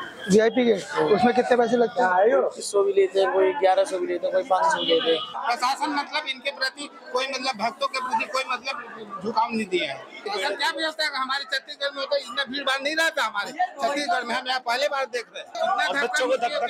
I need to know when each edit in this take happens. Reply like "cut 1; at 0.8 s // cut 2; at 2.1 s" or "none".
cut 1; at 5.3 s // cut 2; at 10.3 s // cut 3; at 15.5 s